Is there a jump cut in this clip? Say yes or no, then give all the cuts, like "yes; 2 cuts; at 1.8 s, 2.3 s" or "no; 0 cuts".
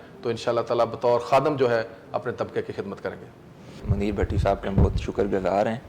yes; 1 cut; at 3.8 s